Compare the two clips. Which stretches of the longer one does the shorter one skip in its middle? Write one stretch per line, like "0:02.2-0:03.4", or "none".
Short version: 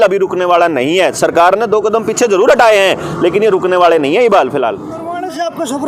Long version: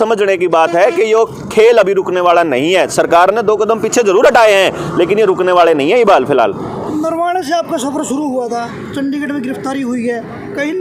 0:06.7-0:07.1